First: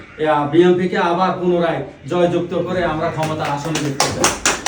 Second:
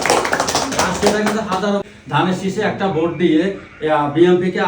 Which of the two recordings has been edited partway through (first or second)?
second